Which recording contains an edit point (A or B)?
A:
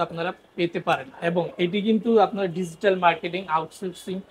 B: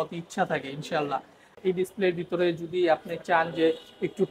B